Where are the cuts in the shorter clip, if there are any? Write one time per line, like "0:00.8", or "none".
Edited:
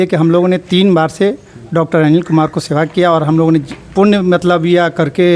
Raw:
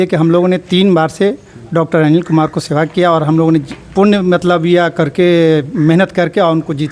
none